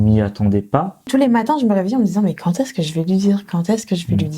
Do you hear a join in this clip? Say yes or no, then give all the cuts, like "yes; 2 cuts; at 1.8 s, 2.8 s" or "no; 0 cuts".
yes; 1 cut; at 1.1 s